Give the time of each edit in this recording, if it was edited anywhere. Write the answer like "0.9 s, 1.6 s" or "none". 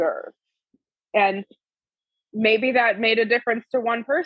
none